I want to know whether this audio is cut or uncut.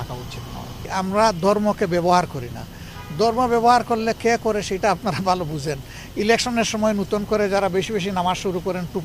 cut